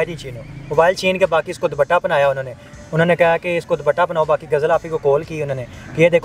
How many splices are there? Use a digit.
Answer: 0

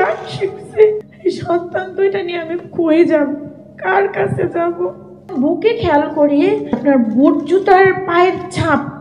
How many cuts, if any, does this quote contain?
3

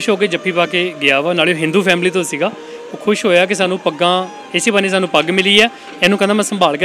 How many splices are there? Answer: 0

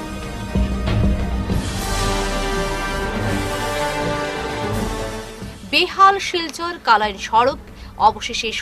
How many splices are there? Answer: 0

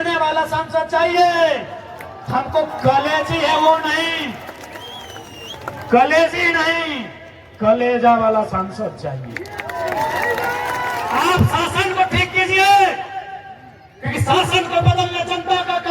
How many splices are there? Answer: 1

